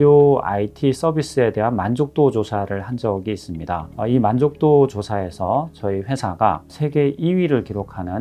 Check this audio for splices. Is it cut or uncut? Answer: cut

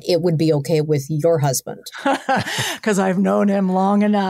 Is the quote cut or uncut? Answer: uncut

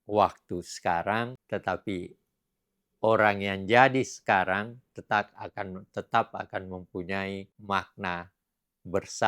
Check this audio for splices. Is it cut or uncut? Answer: cut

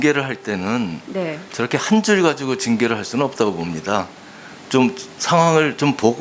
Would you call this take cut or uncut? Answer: uncut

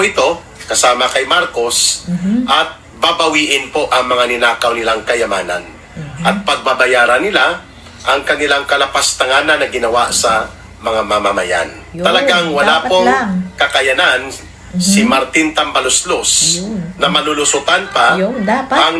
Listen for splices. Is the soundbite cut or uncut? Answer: cut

